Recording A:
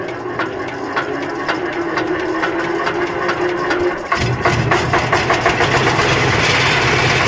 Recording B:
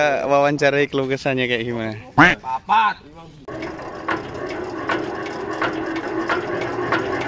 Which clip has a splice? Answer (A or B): B